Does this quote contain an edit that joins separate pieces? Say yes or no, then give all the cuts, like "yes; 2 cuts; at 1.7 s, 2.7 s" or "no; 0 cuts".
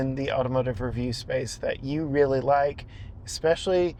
no; 0 cuts